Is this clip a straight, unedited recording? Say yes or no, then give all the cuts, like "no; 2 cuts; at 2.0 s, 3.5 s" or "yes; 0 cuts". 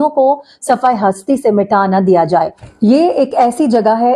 no; 1 cut; at 2.6 s